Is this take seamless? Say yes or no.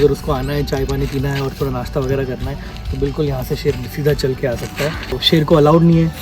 no